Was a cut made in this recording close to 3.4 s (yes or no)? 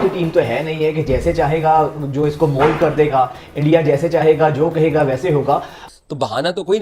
no